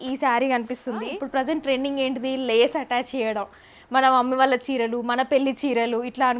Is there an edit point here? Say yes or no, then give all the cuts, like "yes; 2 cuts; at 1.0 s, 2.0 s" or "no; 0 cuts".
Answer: yes; 1 cut; at 1.1 s